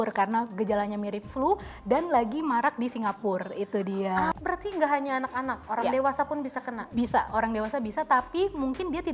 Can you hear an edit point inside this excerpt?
yes; 1 cut; at 4.3 s

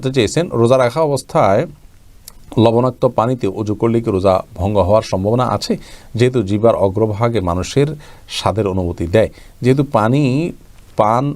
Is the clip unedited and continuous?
yes; 0 cuts

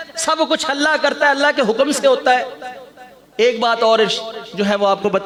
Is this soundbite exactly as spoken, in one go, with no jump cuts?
yes; 0 cuts

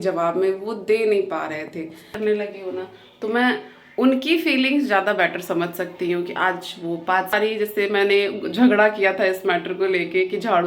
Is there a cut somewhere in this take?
yes; 2 cuts; at 2.1 s, 7.3 s

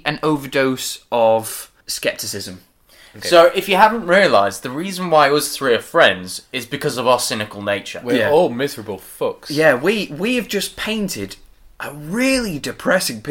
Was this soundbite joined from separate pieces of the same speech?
yes; 1 cut; at 1.8 s

